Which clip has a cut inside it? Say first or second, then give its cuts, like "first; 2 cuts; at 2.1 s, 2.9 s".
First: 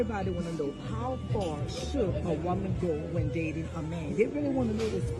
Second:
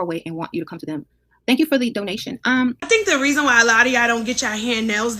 second; 1 cut; at 2.8 s